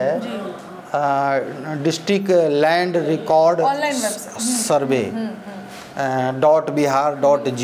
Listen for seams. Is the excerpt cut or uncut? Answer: uncut